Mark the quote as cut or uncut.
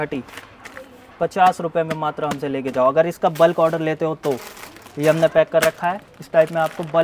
uncut